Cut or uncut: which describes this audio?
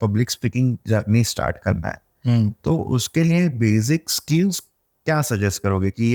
uncut